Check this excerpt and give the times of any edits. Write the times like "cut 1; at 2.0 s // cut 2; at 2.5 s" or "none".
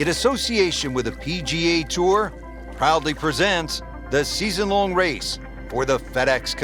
none